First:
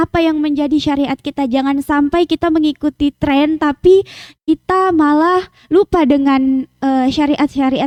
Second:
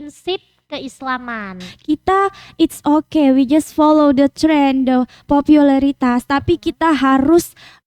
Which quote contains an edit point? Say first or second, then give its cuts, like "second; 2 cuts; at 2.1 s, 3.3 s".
second; 1 cut; at 1.7 s